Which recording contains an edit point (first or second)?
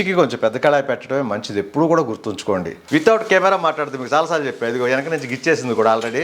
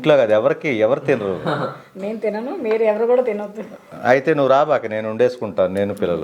first